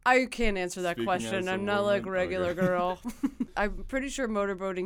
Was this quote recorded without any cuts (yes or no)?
no